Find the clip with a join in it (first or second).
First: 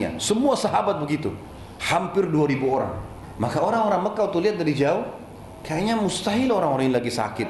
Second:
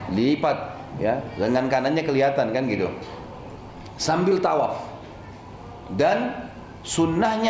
first